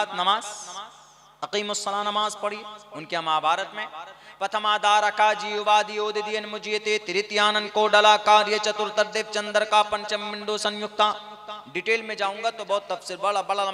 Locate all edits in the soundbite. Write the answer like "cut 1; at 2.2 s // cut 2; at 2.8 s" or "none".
none